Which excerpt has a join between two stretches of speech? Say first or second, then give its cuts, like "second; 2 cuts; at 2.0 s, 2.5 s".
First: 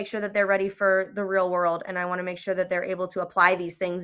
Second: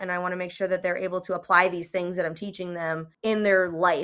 second; 1 cut; at 3.1 s